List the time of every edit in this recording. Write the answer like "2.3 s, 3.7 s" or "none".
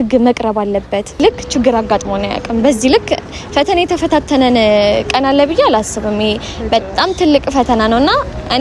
1.2 s